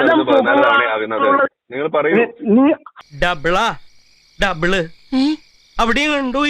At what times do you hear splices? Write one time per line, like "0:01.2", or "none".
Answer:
0:03.0